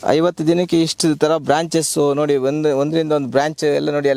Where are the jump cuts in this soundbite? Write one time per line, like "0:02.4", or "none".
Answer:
none